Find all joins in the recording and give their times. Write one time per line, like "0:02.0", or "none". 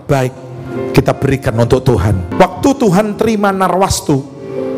none